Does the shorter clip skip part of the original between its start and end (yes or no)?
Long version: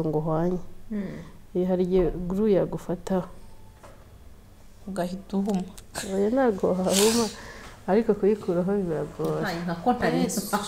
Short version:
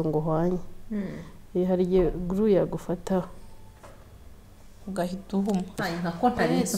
yes